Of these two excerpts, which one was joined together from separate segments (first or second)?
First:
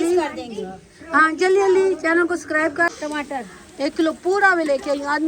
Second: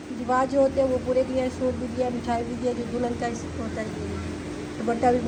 first